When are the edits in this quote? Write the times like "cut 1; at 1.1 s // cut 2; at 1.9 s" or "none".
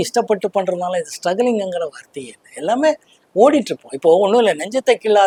none